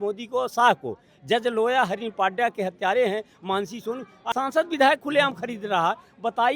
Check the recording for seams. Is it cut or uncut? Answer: cut